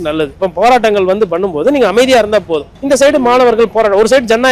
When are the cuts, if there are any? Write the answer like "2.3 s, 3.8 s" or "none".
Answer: 2.7 s